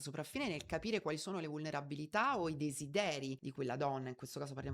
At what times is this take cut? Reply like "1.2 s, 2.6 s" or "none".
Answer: 3.5 s